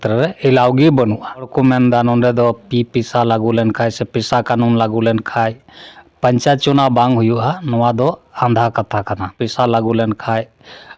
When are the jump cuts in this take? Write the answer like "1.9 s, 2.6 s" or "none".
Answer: 1.5 s, 9.4 s